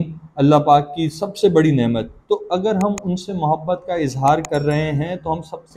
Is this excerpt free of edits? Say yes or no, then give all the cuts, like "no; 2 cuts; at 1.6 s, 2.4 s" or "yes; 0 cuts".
yes; 0 cuts